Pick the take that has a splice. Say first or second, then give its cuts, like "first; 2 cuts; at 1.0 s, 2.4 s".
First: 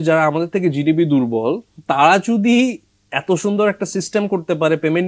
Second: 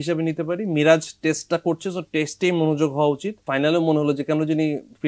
second; 1 cut; at 3.5 s